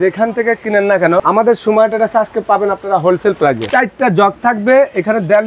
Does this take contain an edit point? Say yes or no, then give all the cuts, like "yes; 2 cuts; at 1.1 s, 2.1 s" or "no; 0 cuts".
yes; 2 cuts; at 1.2 s, 3.6 s